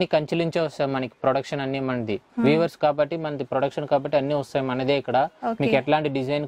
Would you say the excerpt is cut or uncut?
uncut